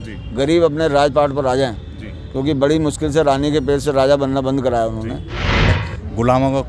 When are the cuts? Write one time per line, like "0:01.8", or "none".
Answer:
0:05.7